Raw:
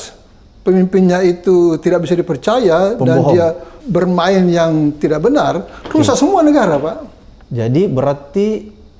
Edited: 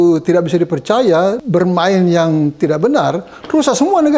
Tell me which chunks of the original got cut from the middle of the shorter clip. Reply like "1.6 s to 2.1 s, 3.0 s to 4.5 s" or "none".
3.0 s to 3.8 s